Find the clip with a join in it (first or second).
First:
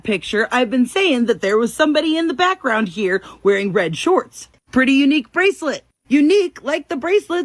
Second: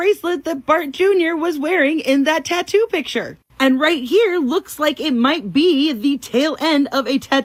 first